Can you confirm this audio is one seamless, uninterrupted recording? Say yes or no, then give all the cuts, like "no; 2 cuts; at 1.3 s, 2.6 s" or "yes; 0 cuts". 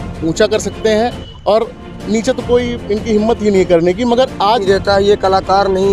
no; 1 cut; at 4.6 s